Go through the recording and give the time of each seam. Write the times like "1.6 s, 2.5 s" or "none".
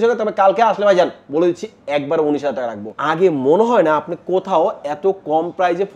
3.0 s